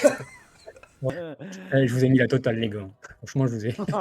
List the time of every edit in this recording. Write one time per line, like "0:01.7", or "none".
0:01.1